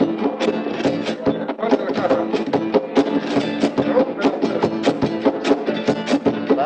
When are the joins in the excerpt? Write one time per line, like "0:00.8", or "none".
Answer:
0:05.6